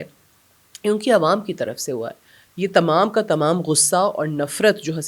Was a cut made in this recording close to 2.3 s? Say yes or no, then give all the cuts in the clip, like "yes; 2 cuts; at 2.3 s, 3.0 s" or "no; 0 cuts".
no; 0 cuts